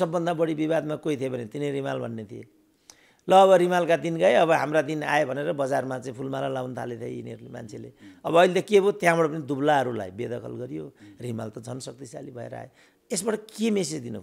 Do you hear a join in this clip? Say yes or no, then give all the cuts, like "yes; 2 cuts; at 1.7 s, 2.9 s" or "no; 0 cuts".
no; 0 cuts